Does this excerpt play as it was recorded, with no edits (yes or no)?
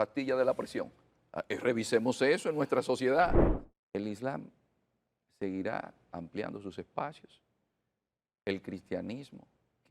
no